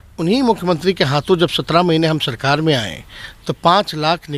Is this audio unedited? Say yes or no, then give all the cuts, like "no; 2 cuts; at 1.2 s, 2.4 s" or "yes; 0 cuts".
yes; 0 cuts